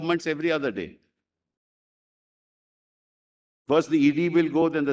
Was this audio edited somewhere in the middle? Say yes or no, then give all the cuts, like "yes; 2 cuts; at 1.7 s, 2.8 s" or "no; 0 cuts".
no; 0 cuts